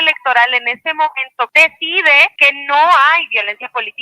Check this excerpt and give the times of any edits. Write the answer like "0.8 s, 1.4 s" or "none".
1.5 s, 2.3 s